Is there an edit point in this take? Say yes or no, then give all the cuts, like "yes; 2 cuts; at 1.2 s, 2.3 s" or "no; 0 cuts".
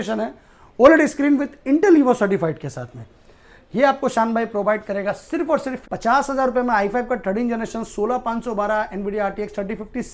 yes; 1 cut; at 5.8 s